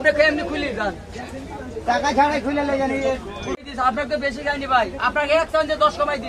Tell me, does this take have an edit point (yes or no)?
yes